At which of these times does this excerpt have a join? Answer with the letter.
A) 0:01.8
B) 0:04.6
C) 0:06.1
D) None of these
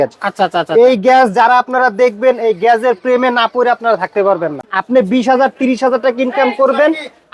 B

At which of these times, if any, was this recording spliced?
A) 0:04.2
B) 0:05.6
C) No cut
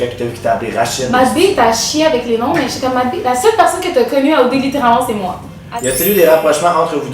B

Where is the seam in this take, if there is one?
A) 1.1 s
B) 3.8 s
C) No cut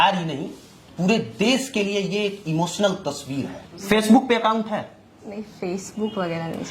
B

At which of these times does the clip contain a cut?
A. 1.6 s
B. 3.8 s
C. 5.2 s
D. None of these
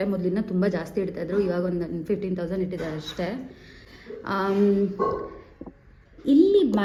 D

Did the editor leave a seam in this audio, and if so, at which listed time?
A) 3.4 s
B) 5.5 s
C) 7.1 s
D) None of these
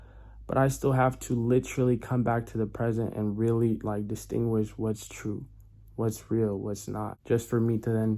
C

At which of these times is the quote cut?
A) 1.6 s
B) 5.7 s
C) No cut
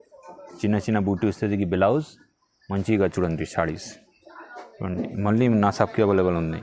C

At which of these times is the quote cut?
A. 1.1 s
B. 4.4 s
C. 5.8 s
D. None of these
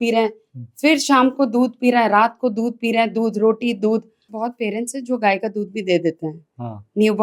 B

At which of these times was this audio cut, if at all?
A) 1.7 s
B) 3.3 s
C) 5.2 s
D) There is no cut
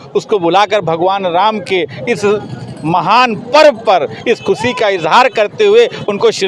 D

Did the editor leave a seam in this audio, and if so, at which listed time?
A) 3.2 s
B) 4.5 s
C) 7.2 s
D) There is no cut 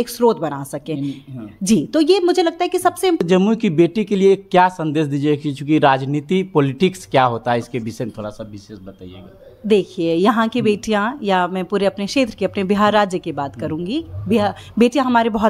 A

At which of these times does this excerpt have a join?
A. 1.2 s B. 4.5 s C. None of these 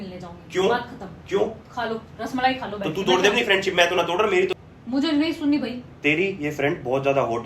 B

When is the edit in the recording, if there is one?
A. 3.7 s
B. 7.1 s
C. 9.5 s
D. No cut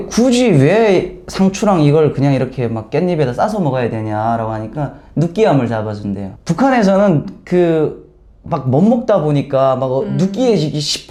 D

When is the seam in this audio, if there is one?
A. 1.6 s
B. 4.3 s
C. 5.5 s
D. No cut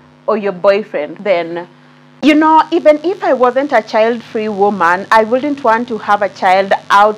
A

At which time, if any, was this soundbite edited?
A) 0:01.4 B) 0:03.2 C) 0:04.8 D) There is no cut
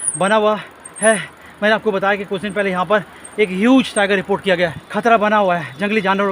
C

